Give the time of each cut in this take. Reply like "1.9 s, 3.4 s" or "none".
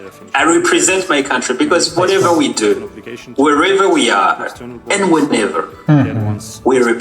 none